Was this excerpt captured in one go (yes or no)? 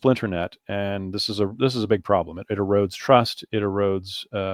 yes